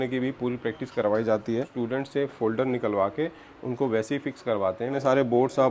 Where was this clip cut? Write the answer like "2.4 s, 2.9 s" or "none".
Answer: 1.7 s, 5.0 s